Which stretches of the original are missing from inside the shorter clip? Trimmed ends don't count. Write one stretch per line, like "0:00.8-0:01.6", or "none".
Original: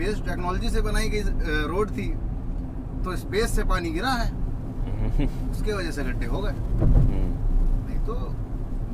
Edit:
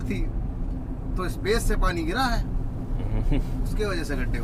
none